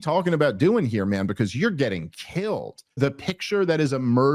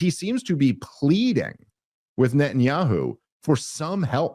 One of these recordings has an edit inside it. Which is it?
first; 1 cut; at 3.0 s

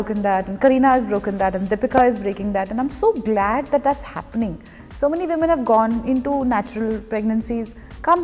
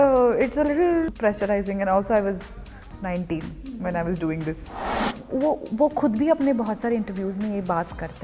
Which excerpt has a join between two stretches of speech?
second; 2 cuts; at 1.1 s, 5.0 s

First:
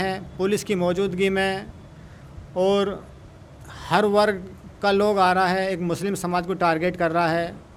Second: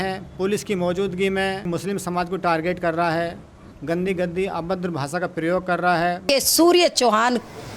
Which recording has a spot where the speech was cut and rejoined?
second; 2 cuts; at 1.6 s, 6.3 s

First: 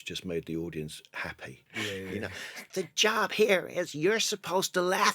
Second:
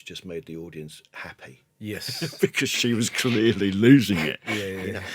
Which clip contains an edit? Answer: first; 1 cut; at 1.7 s

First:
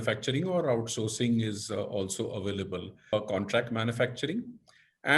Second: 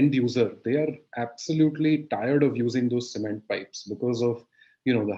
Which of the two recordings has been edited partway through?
first; 1 cut; at 3.1 s

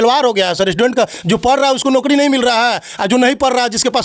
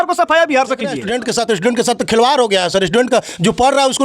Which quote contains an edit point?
second; 1 cut; at 1.0 s

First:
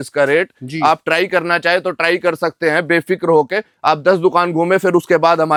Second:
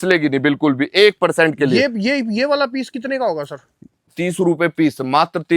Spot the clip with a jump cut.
second; 1 cut; at 4.1 s

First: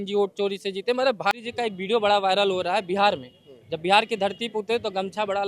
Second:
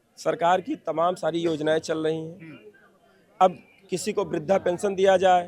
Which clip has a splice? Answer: first; 1 cut; at 1.3 s

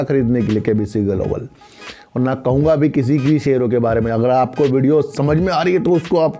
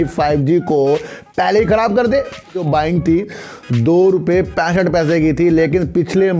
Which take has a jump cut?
second; 1 cut; at 2.6 s

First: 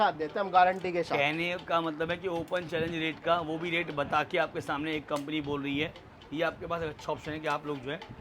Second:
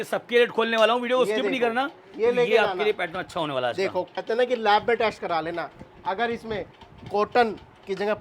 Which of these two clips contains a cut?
second; 1 cut; at 4.2 s

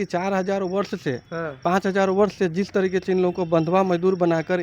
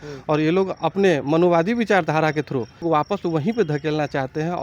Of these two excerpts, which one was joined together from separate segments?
second; 1 cut; at 2.8 s

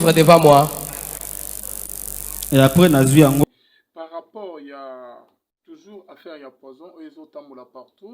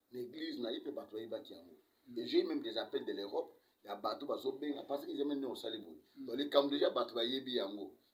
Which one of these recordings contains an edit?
first; 1 cut; at 3.4 s

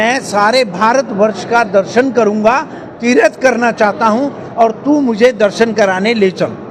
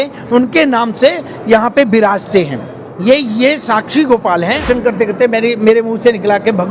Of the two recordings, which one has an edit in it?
second; 1 cut; at 4.6 s

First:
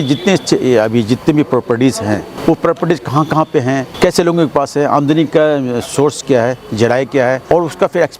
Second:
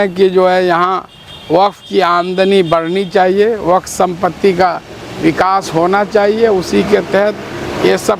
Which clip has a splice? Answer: first; 3 cuts; at 2.3 s, 3.9 s, 7.5 s

